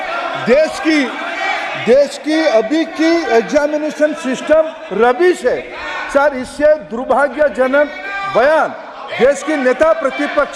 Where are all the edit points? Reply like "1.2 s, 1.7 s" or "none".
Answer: none